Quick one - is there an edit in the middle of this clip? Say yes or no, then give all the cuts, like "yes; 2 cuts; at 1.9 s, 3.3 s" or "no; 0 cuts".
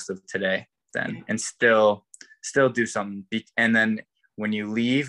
no; 0 cuts